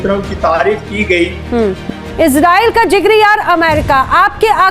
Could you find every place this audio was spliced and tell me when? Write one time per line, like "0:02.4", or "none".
0:01.8